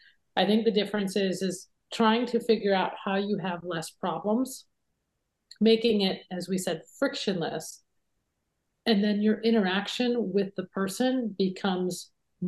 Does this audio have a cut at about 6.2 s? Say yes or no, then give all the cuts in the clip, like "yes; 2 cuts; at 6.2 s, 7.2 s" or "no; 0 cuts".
no; 0 cuts